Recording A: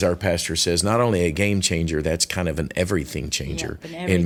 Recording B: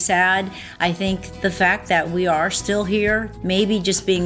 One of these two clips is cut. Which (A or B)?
B